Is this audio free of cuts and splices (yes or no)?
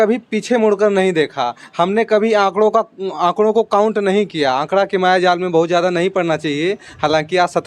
yes